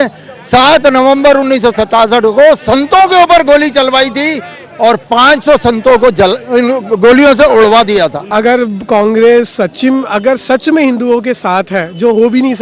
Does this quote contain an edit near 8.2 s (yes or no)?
yes